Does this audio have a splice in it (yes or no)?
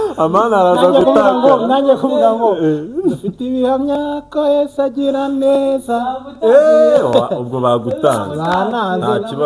no